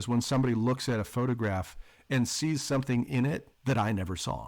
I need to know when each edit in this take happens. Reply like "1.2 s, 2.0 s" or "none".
3.5 s